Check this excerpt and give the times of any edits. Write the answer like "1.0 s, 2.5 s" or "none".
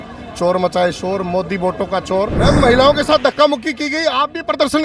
2.4 s